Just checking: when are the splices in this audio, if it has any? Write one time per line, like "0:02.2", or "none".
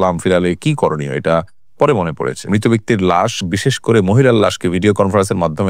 0:02.5